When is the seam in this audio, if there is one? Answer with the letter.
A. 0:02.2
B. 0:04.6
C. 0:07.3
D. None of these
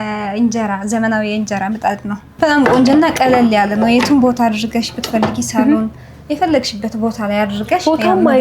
A